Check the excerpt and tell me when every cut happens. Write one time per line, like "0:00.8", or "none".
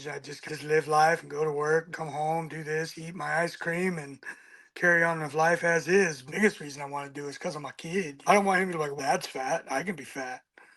0:01.9
0:06.2
0:08.1